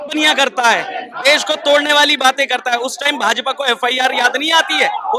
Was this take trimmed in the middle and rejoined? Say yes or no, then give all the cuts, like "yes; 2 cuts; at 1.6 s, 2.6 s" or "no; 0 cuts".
no; 0 cuts